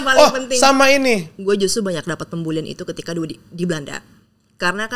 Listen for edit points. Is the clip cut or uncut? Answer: cut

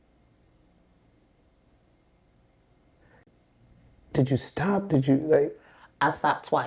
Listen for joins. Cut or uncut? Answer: cut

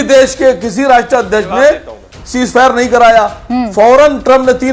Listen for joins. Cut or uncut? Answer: uncut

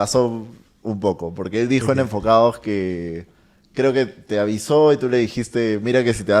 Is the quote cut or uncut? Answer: uncut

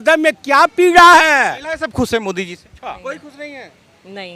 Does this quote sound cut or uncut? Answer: cut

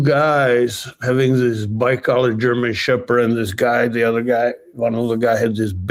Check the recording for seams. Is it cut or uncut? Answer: uncut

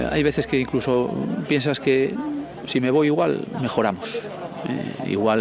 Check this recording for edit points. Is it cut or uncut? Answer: uncut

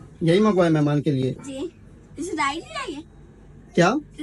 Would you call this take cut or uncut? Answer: uncut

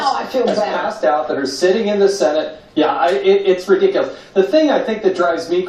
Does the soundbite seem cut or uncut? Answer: cut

